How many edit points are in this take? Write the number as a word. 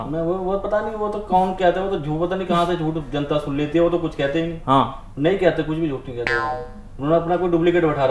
zero